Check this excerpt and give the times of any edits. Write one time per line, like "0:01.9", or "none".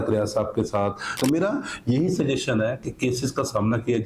0:01.2